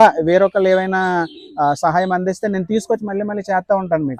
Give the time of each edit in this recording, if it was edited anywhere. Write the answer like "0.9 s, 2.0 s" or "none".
none